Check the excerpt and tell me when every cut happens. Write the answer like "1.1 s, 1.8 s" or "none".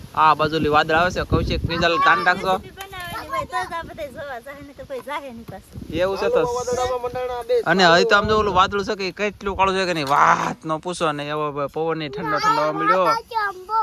none